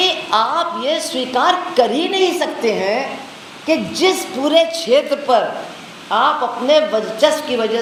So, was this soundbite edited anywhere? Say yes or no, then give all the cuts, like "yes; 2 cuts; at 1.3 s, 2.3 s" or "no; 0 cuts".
no; 0 cuts